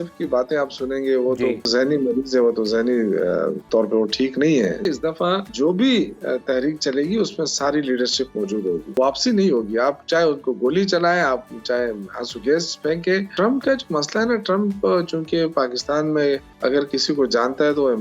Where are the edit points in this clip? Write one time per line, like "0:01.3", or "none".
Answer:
0:01.7
0:03.6
0:04.9
0:09.0
0:13.3
0:16.5